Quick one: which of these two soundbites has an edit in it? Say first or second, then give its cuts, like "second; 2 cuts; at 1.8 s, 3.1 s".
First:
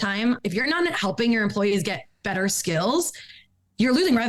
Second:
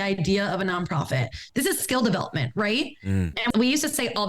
second; 2 cuts; at 1.5 s, 3.5 s